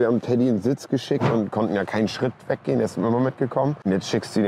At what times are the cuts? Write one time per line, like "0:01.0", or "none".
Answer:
0:01.2